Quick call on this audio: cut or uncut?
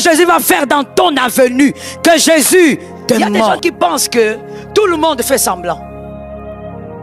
cut